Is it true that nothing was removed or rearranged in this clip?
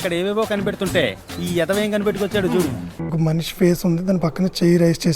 no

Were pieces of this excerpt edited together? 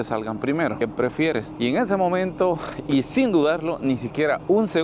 no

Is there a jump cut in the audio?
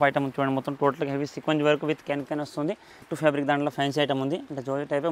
yes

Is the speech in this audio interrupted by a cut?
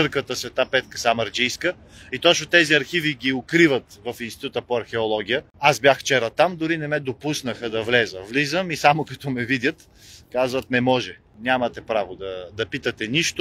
no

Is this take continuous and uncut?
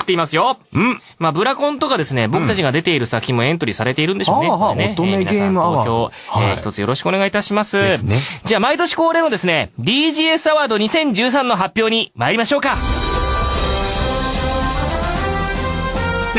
no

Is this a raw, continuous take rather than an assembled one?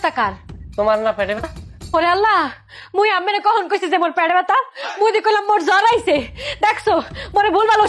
no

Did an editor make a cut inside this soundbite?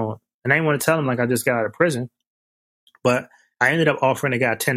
no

